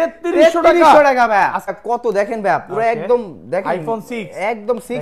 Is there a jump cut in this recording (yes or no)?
yes